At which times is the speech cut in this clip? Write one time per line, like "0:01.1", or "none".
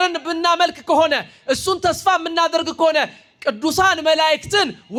none